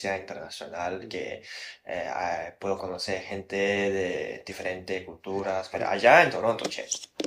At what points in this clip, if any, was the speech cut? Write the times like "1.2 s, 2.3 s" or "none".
5.7 s